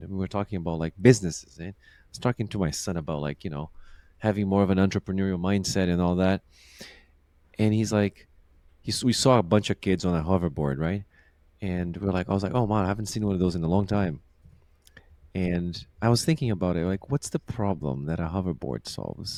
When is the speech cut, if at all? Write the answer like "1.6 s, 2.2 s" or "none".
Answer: none